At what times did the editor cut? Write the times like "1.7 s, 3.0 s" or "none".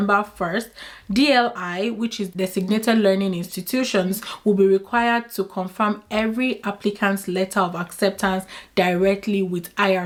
none